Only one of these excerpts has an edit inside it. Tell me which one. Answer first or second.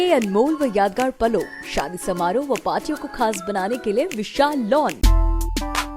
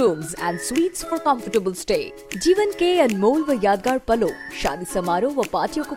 first